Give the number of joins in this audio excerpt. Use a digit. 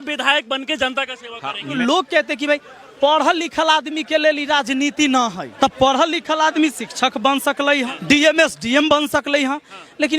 3